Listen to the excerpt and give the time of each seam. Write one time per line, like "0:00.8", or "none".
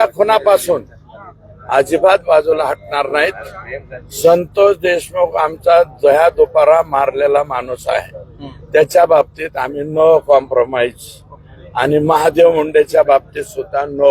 none